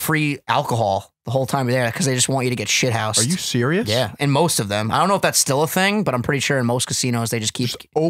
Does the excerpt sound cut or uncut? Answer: uncut